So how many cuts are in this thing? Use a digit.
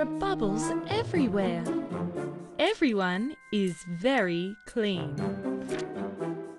0